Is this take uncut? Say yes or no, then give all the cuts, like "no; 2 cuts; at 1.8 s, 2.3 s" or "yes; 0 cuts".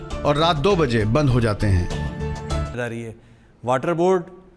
no; 1 cut; at 2.7 s